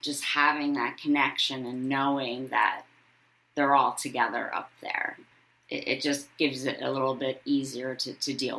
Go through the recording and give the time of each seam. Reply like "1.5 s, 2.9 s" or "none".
5.2 s